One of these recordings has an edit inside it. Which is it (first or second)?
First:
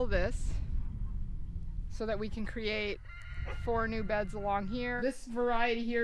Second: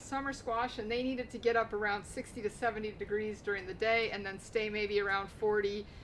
first